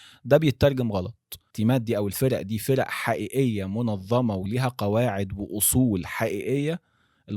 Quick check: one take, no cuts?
no; 1 cut; at 1.4 s

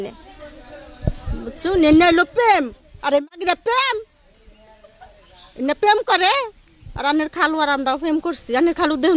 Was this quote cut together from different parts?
no; 0 cuts

